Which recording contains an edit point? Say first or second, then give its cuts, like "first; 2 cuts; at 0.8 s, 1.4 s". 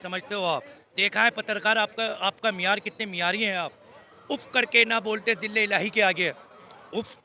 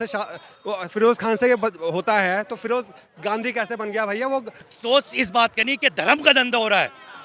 second; 1 cut; at 4.7 s